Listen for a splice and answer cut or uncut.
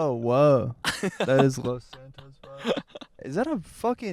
cut